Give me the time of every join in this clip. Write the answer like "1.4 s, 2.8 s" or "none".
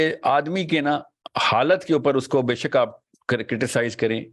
1.2 s

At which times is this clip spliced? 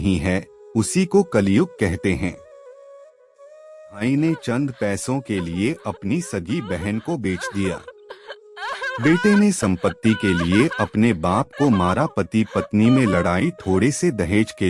4.0 s

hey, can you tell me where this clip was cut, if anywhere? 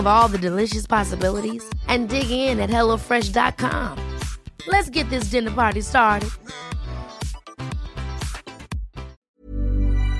9.2 s

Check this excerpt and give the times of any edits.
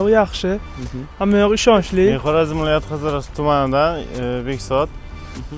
2.2 s

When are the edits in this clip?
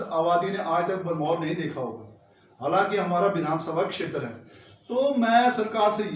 none

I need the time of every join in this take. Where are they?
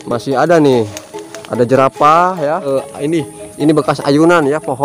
2.7 s

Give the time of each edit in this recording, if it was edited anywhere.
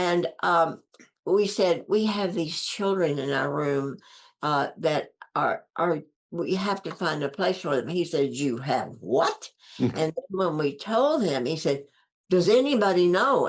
none

